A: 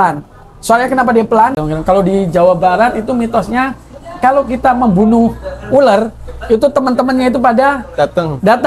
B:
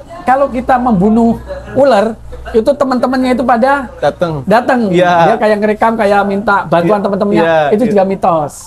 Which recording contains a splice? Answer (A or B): A